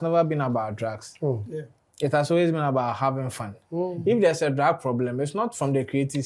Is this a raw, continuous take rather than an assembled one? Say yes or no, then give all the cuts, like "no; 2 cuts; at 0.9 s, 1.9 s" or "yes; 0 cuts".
yes; 0 cuts